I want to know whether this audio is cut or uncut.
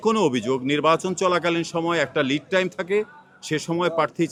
uncut